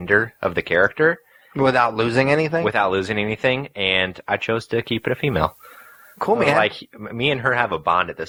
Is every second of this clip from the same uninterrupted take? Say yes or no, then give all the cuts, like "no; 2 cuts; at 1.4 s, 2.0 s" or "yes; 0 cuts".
yes; 0 cuts